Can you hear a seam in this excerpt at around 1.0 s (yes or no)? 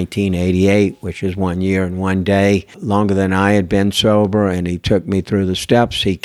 no